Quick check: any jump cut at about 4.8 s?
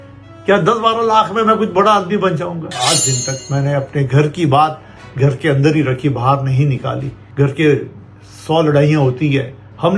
no; 2 cuts; at 2.7 s, 7.2 s

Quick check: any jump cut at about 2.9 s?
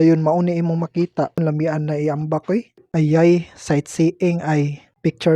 yes; 2 cuts; at 1.4 s, 2.9 s

